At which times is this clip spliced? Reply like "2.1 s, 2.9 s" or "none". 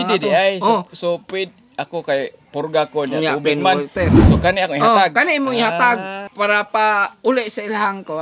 6.2 s

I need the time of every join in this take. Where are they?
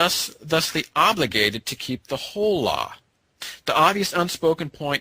none

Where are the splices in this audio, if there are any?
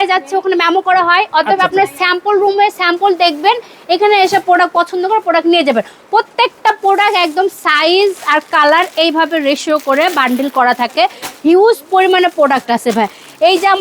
none

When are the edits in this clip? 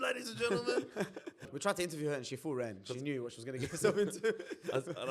1.4 s

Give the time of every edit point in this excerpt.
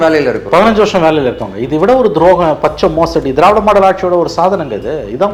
none

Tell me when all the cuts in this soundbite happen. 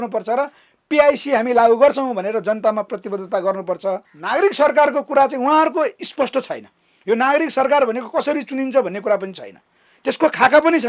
4.1 s

